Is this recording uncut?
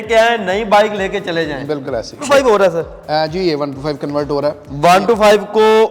no; 1 cut; at 2.2 s

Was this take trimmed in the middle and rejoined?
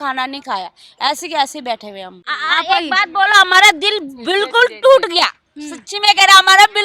no; 0 cuts

